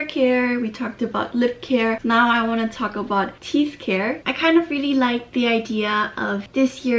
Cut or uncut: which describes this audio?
cut